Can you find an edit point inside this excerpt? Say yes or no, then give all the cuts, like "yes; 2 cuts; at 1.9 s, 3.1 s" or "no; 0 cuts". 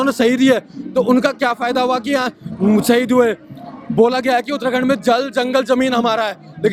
no; 0 cuts